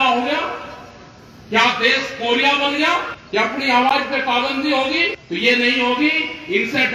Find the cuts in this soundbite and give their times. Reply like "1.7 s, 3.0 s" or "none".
3.2 s, 5.2 s